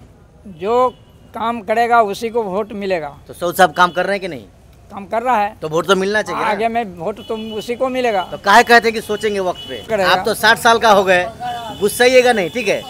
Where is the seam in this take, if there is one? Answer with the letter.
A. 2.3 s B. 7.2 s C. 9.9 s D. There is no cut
C